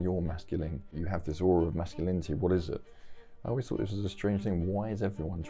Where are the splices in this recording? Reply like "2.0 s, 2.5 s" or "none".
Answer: 1.0 s